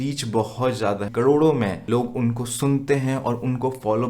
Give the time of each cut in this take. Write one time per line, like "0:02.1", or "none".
0:01.1
0:01.8